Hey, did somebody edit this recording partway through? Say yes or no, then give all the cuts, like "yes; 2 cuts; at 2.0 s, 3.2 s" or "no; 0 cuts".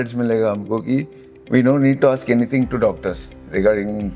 no; 0 cuts